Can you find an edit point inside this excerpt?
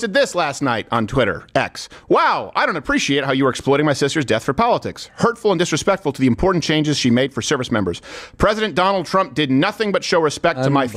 no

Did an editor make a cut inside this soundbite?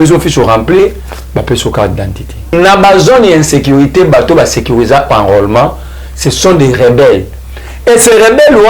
yes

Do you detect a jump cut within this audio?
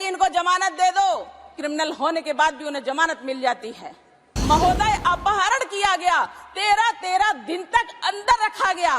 yes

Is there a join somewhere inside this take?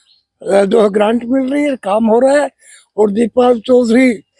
no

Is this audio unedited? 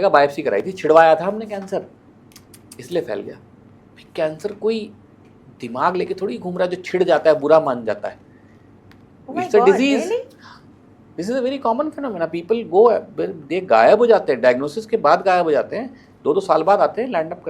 yes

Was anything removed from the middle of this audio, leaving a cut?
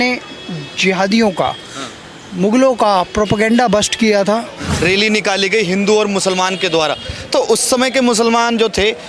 yes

